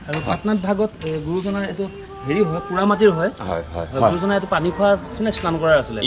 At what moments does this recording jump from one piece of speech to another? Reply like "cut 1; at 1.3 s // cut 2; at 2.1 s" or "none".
none